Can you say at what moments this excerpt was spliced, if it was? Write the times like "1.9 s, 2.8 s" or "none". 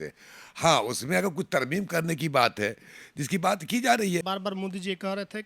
4.2 s